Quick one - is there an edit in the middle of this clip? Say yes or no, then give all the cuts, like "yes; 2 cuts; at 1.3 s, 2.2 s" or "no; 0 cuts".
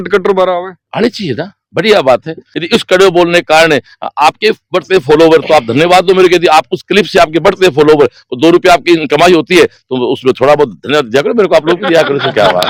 no; 0 cuts